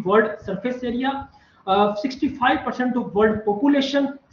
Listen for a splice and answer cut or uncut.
uncut